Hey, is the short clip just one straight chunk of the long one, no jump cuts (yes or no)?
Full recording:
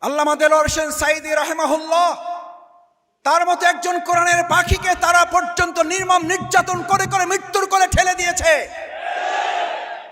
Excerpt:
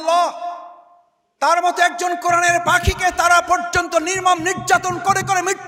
yes